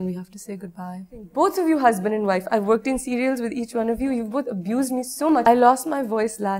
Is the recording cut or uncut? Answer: cut